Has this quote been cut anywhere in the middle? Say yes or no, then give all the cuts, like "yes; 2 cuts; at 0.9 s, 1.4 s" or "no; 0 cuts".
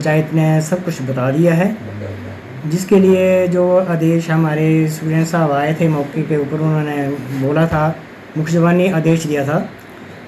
no; 0 cuts